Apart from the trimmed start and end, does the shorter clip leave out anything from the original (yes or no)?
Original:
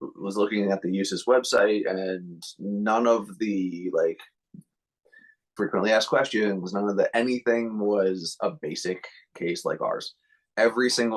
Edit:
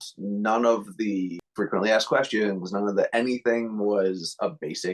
yes